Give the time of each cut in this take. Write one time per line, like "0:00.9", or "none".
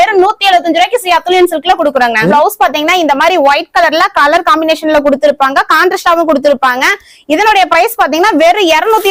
0:02.3